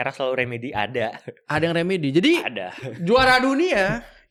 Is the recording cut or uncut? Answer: uncut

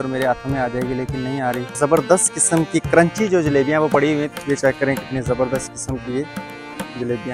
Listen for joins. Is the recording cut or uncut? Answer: cut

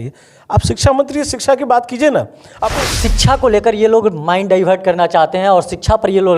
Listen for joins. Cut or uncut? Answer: cut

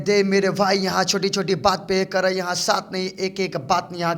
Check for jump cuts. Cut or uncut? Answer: uncut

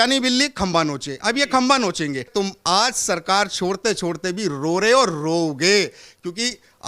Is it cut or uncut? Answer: cut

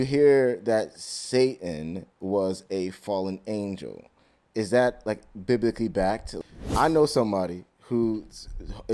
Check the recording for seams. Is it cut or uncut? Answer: cut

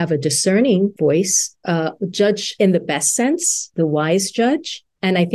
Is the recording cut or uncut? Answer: cut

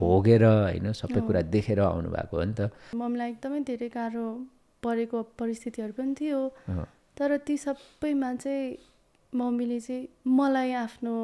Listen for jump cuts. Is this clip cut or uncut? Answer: cut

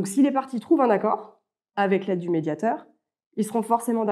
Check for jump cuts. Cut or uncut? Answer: uncut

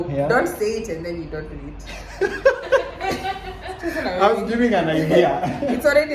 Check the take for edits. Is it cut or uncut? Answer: uncut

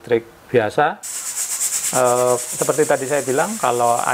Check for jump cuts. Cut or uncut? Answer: cut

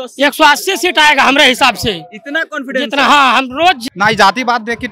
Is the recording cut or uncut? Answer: cut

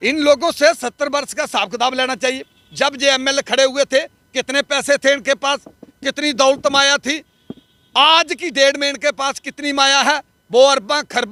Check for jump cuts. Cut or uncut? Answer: uncut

